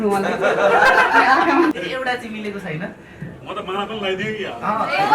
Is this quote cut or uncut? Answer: cut